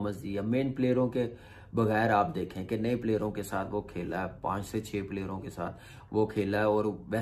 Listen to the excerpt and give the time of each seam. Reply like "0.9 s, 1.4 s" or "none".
none